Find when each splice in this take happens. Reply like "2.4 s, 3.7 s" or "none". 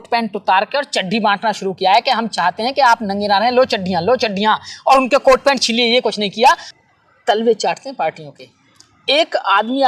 6.7 s